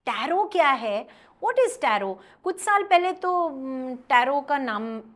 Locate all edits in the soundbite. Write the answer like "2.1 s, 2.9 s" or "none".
none